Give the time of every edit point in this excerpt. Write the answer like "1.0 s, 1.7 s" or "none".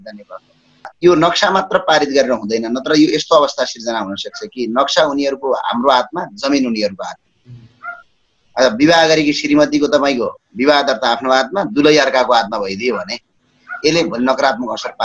0.9 s